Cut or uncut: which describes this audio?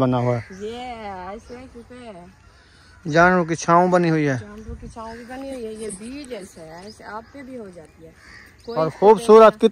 uncut